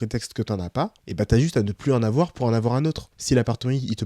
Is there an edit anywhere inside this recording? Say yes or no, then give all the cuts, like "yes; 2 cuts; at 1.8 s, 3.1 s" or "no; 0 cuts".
yes; 2 cuts; at 1.0 s, 3.1 s